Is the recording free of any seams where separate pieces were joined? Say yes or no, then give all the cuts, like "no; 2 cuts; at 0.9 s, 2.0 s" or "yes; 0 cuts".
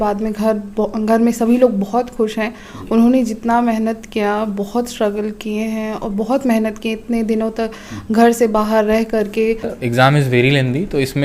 no; 1 cut; at 9.8 s